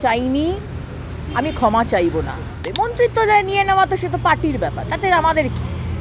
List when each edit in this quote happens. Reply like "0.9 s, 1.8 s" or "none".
2.6 s